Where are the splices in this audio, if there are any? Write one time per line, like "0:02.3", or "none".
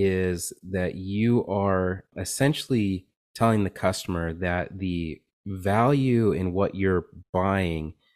0:02.1